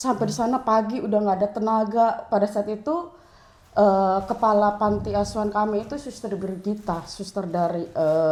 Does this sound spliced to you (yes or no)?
no